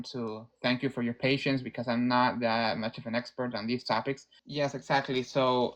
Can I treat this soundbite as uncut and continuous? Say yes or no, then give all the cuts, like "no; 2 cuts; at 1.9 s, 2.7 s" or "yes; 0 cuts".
no; 1 cut; at 4.3 s